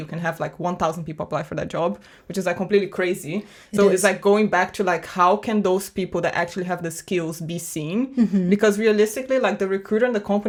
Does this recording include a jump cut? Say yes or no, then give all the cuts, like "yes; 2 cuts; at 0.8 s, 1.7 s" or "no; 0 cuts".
no; 0 cuts